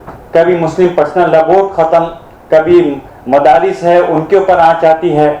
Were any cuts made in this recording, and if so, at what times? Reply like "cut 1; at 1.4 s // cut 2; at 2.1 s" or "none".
none